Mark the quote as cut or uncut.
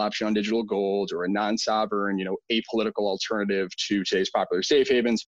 uncut